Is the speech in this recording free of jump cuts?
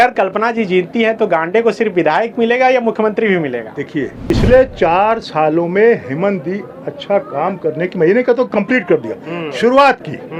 no; 1 cut; at 4.3 s

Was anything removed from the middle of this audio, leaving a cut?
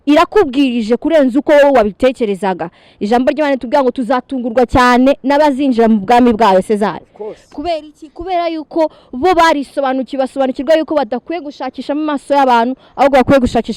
no; 0 cuts

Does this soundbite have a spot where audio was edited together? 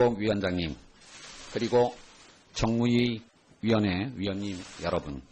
no; 0 cuts

